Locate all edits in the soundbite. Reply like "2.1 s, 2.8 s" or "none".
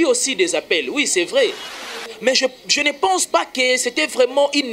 1.6 s